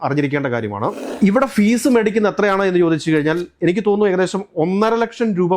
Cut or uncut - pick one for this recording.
cut